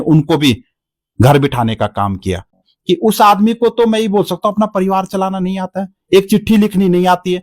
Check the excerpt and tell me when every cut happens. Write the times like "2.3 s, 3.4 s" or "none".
2.7 s